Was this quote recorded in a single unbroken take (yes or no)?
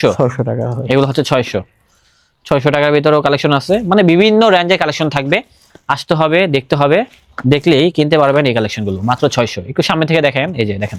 yes